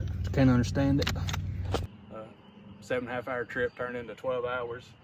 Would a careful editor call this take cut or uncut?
cut